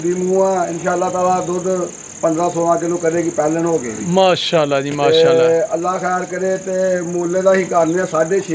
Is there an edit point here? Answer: no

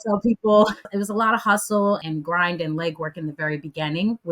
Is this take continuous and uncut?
no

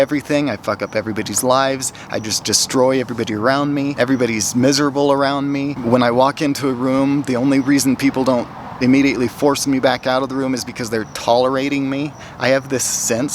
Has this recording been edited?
yes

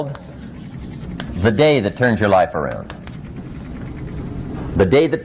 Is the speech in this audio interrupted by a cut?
no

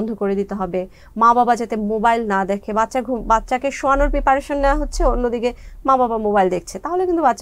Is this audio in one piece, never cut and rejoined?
yes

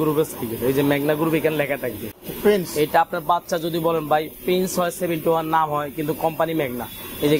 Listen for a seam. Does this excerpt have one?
no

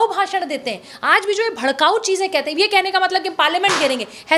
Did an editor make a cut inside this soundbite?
no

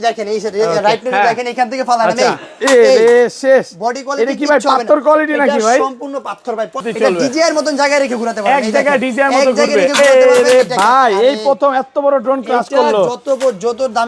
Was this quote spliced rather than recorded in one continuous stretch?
yes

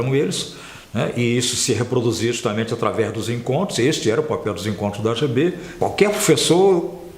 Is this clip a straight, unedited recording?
no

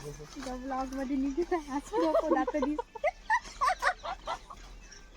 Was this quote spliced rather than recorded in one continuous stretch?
no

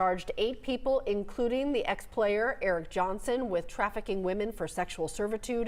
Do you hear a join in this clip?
no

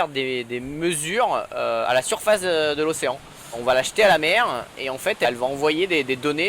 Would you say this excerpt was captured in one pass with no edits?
no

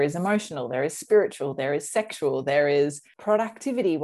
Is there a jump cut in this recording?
yes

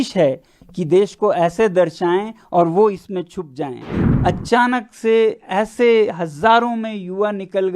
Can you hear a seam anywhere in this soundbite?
yes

